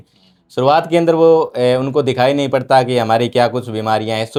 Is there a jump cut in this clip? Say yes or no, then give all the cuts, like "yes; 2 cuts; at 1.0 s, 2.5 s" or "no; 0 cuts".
no; 0 cuts